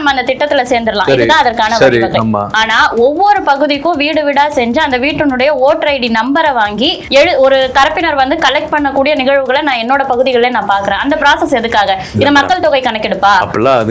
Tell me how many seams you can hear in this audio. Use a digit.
1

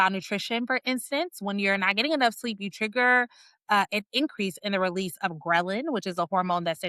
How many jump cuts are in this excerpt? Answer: 0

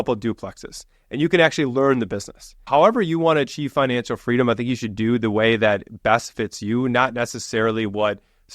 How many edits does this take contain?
1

